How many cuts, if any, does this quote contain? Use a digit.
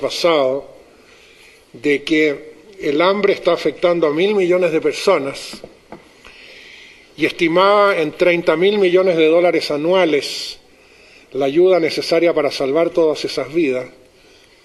1